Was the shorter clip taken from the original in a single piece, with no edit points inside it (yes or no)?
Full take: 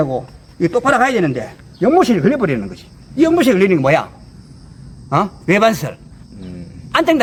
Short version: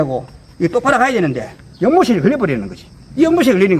yes